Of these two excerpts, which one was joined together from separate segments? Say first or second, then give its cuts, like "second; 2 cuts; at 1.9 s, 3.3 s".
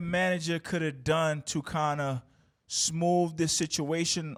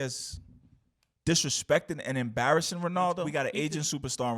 second; 1 cut; at 3.3 s